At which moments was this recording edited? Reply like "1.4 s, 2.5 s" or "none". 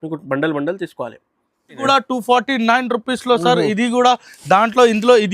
1.8 s